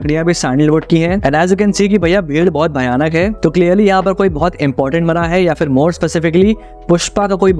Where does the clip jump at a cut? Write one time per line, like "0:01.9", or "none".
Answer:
none